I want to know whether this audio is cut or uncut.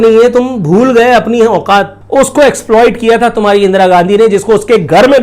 cut